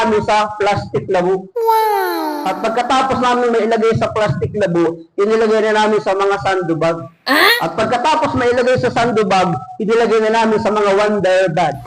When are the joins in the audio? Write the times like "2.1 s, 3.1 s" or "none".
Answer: none